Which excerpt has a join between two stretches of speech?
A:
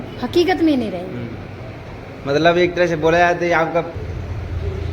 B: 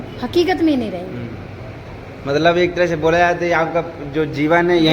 A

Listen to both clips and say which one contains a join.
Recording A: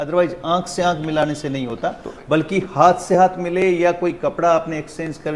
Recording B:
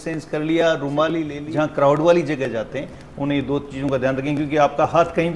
B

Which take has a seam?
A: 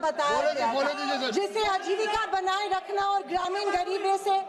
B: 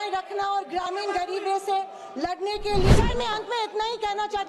B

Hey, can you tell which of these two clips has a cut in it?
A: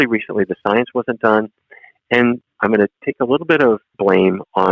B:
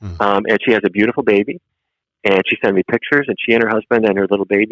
A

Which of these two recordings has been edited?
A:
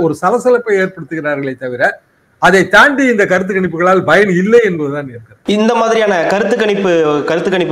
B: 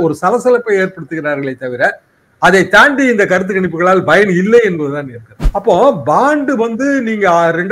B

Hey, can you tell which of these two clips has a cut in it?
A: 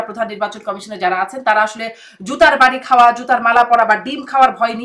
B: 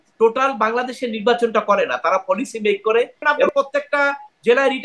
B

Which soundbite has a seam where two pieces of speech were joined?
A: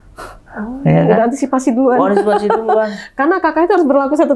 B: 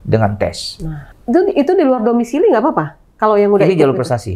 B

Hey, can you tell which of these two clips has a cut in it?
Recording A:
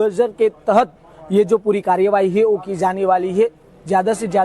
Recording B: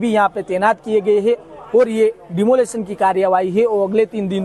A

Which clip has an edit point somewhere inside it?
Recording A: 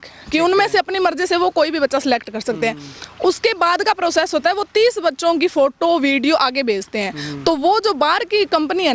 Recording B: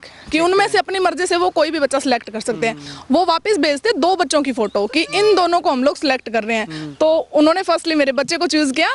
B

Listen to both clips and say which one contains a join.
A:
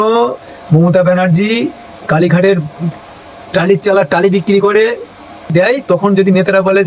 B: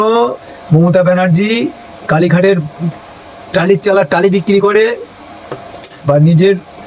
A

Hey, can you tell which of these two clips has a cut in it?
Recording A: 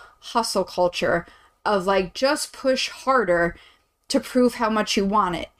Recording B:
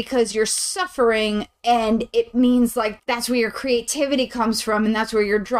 B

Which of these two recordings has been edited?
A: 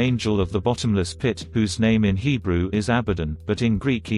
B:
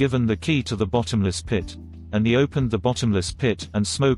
B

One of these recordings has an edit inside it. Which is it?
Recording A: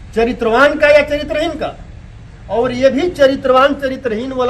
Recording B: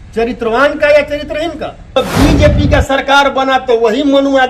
B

